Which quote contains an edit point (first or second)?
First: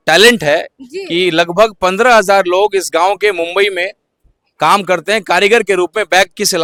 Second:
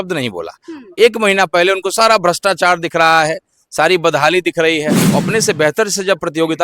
second